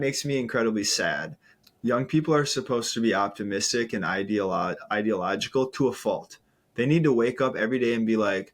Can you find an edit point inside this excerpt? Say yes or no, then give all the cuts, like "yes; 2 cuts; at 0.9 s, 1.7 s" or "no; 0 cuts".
yes; 1 cut; at 1.6 s